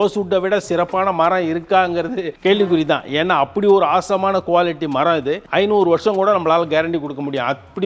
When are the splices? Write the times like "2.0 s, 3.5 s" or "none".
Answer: none